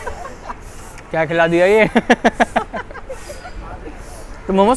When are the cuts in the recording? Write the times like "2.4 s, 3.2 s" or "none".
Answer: none